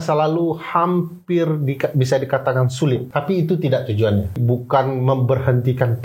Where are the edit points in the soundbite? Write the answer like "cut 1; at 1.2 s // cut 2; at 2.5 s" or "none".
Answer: cut 1; at 3.1 s // cut 2; at 4.4 s